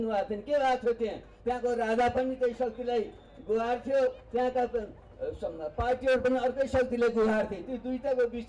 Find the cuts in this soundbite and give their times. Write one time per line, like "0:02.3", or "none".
none